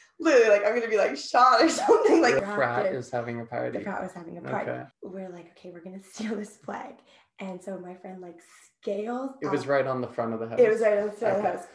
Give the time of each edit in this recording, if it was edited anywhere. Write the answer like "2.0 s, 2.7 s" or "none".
2.4 s, 4.9 s